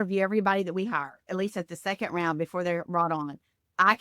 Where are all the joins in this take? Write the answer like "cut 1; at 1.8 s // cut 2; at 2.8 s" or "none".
cut 1; at 1.2 s